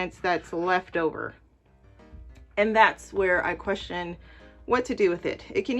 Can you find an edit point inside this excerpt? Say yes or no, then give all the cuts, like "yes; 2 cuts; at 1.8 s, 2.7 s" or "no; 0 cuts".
no; 0 cuts